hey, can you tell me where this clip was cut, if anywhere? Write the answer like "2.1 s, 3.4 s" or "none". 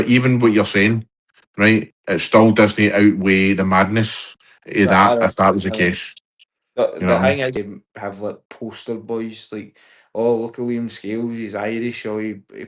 7.6 s